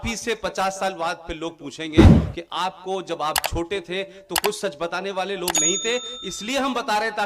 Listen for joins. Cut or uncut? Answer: cut